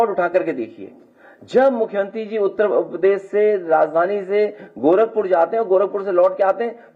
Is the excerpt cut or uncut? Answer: uncut